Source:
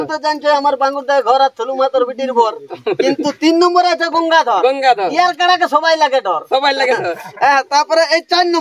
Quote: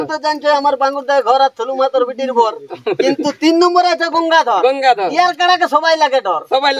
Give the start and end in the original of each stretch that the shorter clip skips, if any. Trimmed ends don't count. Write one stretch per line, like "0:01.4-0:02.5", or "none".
none

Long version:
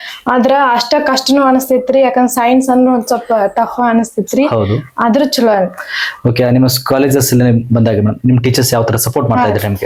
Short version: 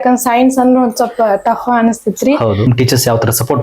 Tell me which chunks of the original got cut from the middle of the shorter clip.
0:04.8-0:08.3

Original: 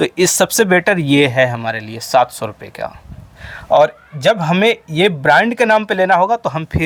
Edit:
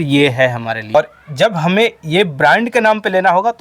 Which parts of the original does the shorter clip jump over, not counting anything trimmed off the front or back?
0:01.9-0:03.8

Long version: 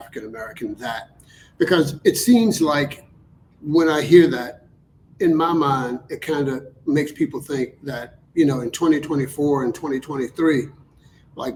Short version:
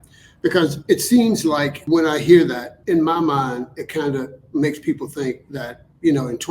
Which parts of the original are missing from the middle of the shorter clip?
0:02.9-0:03.6
0:04.5-0:05.0

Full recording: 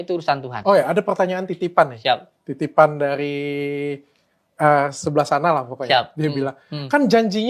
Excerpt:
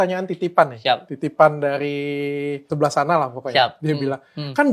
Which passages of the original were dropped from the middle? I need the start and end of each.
0:02.4-0:02.5
0:04.0-0:05.0

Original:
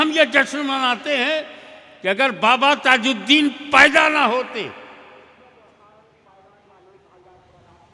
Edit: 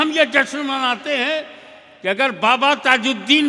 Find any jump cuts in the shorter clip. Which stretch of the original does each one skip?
none

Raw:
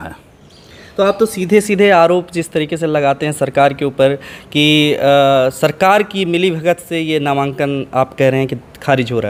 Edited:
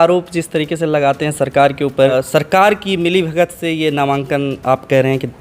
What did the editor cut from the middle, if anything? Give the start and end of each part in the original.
0:04.1-0:05.4

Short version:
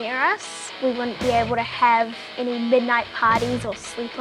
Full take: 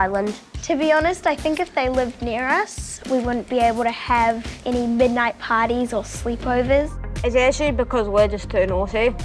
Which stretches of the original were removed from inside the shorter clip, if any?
none

